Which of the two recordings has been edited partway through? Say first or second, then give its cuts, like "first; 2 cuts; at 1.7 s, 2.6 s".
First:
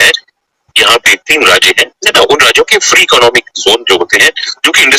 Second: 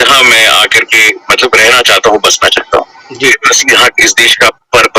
second; 1 cut; at 3.4 s